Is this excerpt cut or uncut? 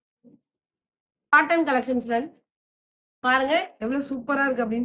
cut